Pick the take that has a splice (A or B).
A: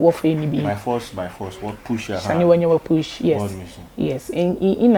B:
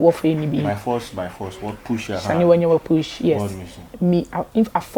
B